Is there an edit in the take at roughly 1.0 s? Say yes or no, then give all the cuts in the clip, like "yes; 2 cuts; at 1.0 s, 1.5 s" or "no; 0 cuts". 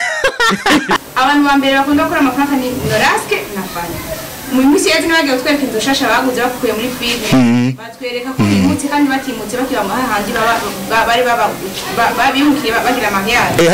yes; 1 cut; at 1.0 s